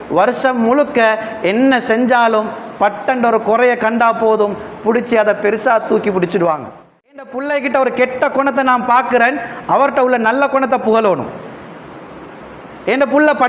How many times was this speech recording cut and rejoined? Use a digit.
1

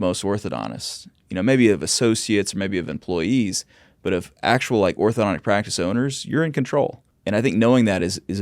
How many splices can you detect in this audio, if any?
1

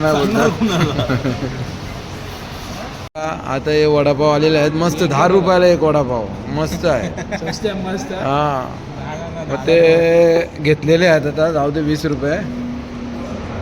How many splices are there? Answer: 1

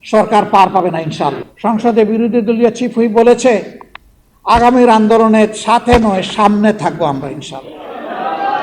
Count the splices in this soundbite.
1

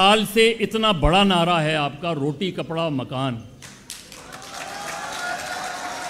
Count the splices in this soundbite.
0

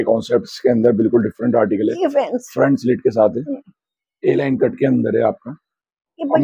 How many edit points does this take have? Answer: 0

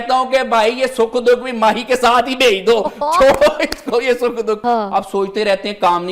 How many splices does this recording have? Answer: 1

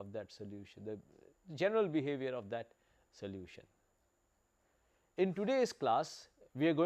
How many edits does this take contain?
1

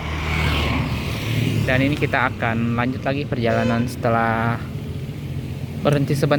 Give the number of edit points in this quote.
0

